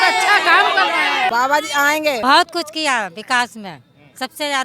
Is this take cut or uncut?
cut